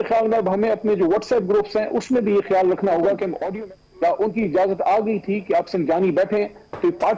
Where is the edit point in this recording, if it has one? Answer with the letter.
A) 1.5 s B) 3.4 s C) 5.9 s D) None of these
B